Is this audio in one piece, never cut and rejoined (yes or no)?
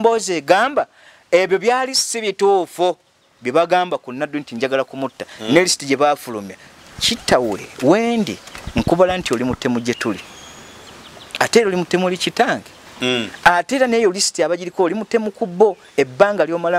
yes